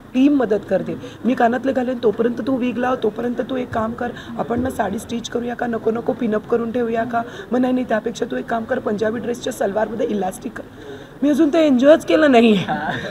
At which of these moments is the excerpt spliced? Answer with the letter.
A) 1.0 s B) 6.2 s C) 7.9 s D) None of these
D